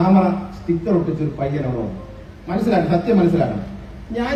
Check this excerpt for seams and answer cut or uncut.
uncut